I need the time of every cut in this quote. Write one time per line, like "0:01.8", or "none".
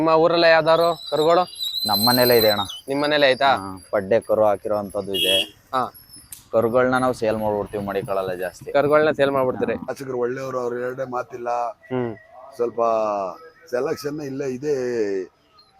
0:09.9